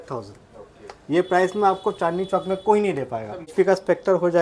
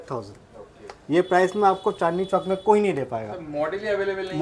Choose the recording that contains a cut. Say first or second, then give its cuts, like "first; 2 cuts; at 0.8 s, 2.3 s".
first; 1 cut; at 3.5 s